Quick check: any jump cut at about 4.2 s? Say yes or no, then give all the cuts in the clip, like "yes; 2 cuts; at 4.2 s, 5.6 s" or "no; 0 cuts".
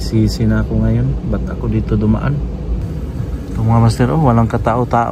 no; 0 cuts